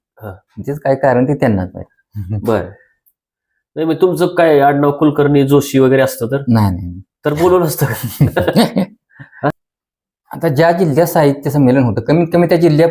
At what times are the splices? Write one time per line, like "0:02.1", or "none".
0:09.5